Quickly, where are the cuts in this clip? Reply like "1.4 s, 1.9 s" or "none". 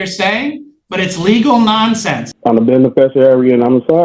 2.3 s